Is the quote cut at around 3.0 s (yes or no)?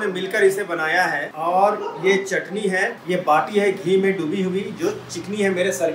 yes